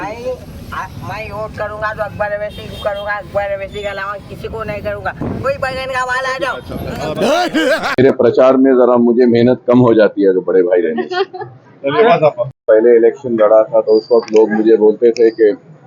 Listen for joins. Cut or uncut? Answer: cut